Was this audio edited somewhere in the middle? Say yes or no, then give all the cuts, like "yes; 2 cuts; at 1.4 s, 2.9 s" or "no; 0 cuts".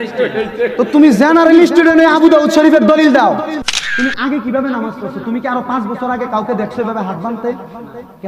yes; 1 cut; at 3.6 s